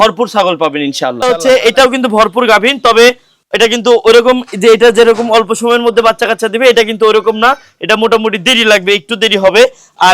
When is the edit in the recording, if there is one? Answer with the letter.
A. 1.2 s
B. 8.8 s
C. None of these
A